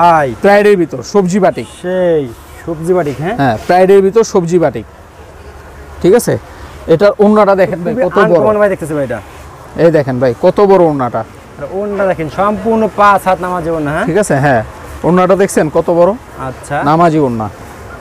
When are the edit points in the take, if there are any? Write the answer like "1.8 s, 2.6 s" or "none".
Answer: none